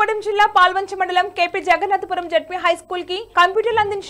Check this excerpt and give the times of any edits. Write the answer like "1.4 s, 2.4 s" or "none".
none